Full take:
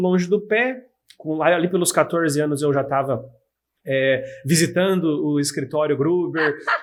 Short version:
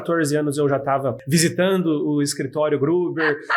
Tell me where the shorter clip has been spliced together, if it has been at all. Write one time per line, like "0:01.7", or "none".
0:01.2